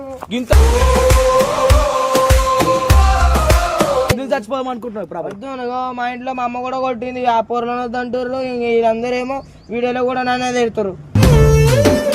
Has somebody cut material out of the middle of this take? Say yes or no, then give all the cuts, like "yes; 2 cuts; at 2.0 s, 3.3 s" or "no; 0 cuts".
yes; 1 cut; at 4.1 s